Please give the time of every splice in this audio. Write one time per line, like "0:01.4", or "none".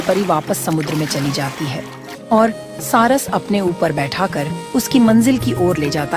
0:02.1